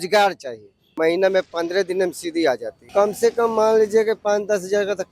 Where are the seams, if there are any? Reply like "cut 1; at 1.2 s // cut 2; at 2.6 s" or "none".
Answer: cut 1; at 0.9 s // cut 2; at 2.8 s